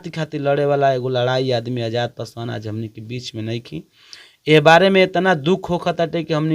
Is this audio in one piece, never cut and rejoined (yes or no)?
yes